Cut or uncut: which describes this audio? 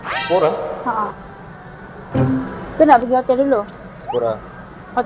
uncut